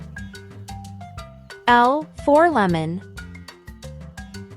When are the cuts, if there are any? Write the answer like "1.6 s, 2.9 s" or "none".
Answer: 1.4 s, 3.0 s